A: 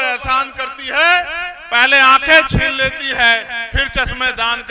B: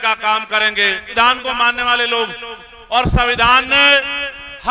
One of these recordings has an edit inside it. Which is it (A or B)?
B